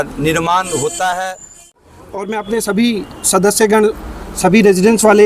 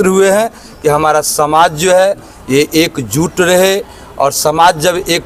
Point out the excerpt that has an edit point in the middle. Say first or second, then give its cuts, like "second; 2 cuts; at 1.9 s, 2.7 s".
first; 1 cut; at 1.6 s